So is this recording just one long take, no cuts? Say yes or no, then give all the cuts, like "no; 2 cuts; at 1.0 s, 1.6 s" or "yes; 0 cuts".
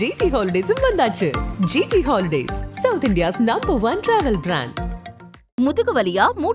yes; 0 cuts